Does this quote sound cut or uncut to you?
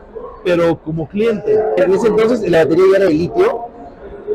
cut